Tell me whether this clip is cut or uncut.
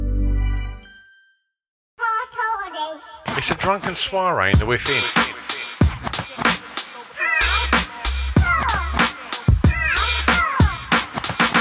cut